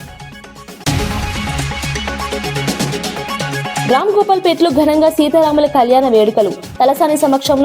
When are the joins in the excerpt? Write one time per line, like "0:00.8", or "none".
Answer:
0:00.8
0:03.8